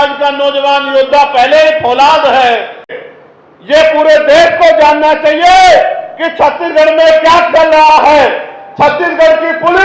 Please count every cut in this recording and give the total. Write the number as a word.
one